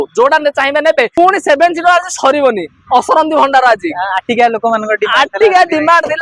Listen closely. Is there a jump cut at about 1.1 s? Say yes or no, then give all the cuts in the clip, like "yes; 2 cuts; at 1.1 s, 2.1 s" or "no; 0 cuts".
yes; 1 cut; at 1.1 s